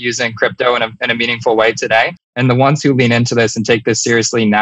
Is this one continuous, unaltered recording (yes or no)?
no